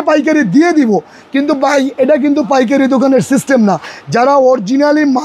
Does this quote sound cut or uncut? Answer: uncut